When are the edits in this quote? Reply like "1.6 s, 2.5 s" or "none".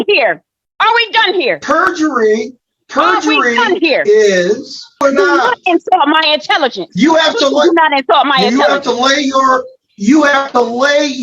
5.0 s